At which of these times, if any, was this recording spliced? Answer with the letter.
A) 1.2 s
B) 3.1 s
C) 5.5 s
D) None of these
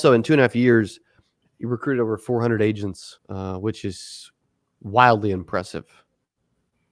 B